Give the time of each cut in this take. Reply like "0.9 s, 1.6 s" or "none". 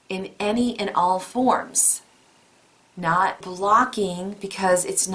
3.5 s